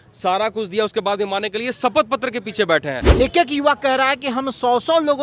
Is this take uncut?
no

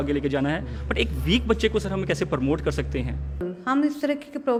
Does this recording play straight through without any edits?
yes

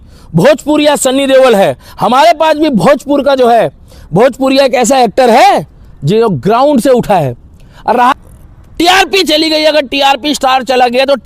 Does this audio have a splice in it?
yes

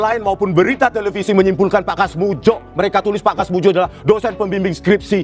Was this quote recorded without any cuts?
yes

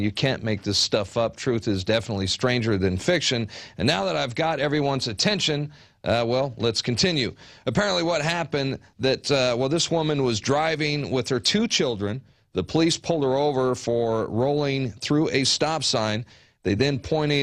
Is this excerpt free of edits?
yes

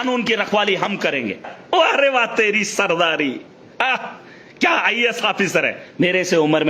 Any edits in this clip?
yes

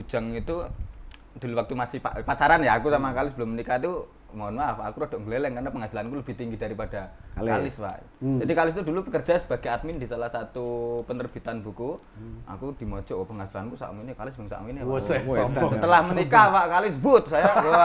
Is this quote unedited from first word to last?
yes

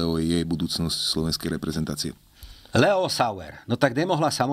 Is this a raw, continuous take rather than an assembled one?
yes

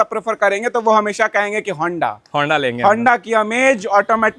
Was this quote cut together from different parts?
no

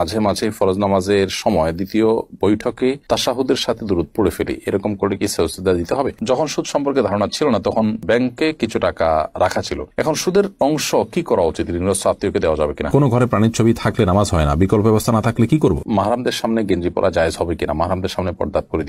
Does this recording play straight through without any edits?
no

